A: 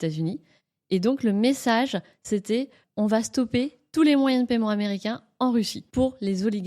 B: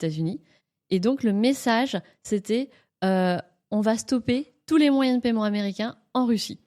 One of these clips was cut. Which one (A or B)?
A